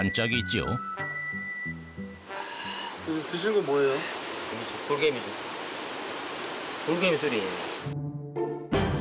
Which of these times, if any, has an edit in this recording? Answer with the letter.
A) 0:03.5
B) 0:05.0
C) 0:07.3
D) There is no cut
D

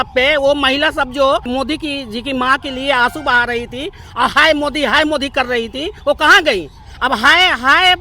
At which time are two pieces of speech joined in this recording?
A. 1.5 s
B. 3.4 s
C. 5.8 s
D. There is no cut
A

